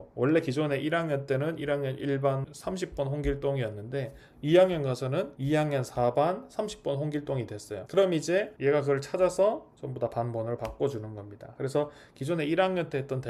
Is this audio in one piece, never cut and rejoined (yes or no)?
yes